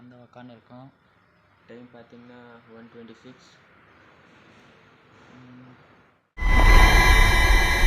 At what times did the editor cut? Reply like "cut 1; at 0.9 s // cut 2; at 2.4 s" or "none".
cut 1; at 6.7 s